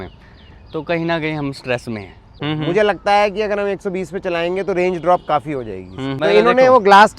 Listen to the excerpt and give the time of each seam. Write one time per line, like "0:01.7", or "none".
0:02.3
0:06.2